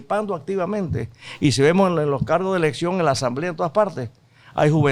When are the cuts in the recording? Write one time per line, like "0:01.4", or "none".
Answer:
none

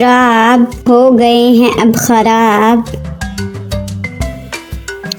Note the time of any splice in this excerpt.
none

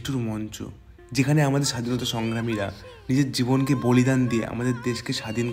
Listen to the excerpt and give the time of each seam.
none

